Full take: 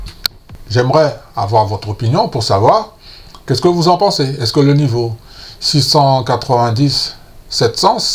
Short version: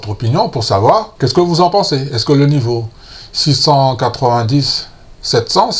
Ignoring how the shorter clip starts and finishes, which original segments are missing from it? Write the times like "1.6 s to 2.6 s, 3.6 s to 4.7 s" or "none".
2.9 s to 3.4 s